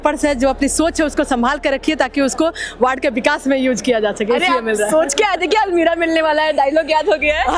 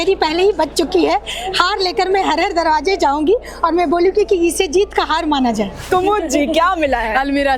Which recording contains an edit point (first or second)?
second